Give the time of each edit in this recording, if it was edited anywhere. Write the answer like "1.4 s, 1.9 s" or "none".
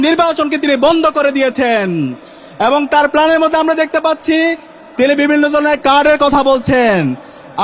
none